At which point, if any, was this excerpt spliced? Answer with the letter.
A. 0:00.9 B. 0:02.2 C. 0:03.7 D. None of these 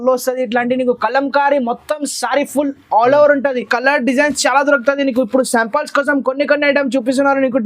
C